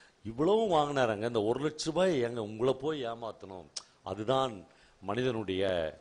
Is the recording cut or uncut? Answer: uncut